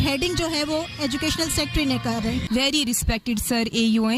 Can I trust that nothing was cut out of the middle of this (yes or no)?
no